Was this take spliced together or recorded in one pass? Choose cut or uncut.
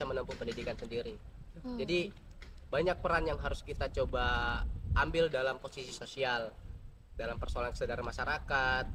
uncut